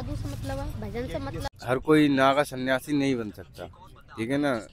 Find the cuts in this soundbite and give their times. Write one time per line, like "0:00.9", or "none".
0:01.5